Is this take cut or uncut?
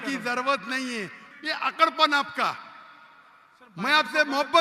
cut